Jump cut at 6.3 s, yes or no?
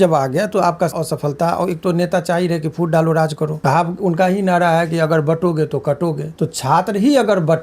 yes